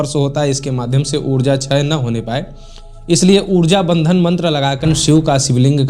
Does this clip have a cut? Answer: yes; 1 cut; at 4.8 s

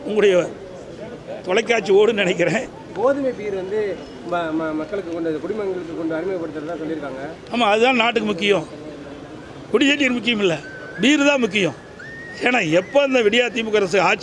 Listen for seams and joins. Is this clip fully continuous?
no; 1 cut; at 2.8 s

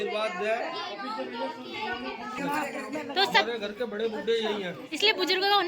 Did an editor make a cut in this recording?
yes; 1 cut; at 2.4 s

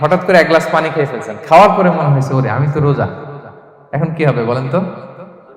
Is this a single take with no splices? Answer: yes; 0 cuts

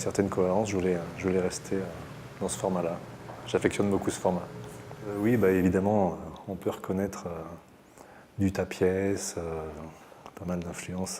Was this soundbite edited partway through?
yes; 1 cut; at 5.2 s

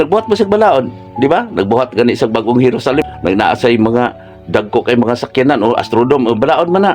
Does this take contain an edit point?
yes; 1 cut; at 3.0 s

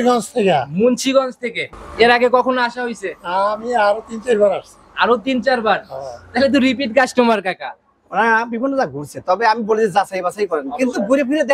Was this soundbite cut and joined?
yes; 1 cut; at 1.7 s

